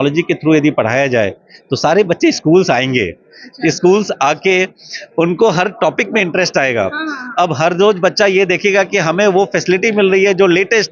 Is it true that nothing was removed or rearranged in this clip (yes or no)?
yes